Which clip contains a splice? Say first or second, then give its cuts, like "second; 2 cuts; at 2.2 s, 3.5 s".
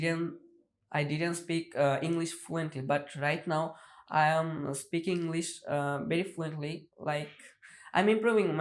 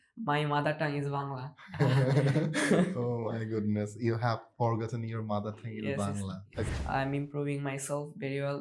second; 1 cut; at 6.7 s